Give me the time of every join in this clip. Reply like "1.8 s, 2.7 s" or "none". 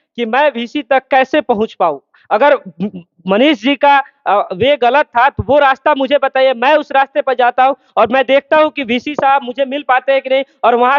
none